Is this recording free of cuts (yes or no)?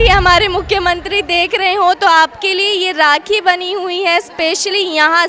yes